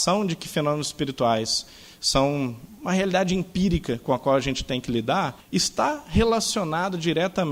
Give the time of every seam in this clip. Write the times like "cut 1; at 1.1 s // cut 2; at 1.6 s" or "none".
cut 1; at 2.7 s // cut 2; at 5.4 s

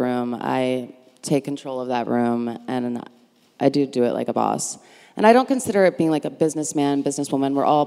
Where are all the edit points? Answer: none

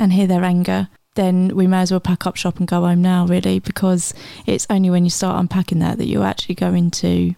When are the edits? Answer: none

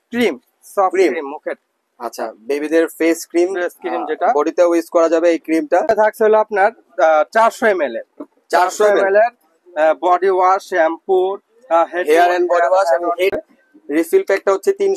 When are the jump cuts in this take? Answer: cut 1; at 5.9 s // cut 2; at 13.3 s

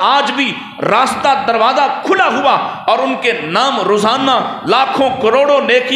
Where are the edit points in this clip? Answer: none

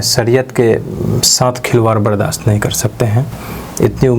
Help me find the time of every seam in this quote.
none

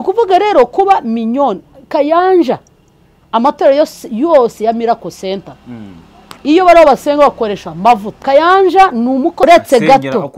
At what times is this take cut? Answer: cut 1; at 8.1 s // cut 2; at 9.4 s

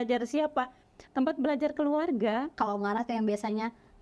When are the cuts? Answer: cut 1; at 2.5 s

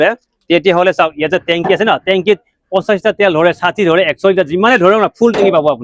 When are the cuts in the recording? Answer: none

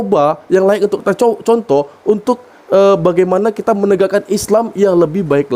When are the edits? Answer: none

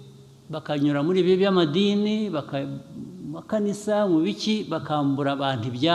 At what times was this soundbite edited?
none

